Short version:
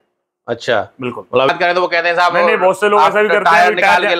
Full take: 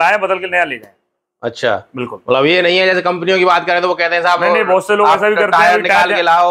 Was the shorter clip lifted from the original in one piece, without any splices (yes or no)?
no